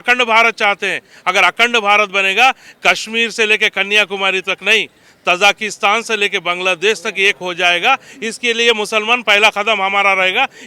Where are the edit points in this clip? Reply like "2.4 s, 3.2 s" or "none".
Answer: none